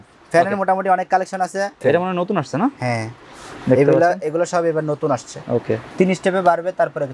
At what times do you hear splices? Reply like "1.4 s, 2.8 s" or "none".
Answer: 1.8 s, 5.8 s